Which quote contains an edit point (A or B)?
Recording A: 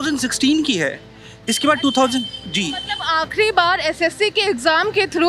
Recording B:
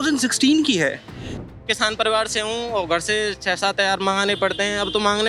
B